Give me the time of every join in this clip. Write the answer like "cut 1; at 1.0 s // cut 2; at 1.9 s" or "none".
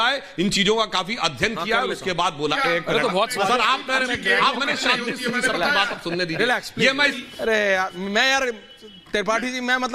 cut 1; at 2.6 s // cut 2; at 7.1 s